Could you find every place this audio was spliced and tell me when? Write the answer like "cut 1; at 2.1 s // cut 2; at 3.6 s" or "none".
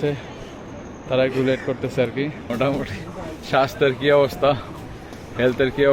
cut 1; at 2.4 s